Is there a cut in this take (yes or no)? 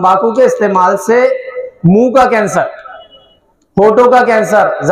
no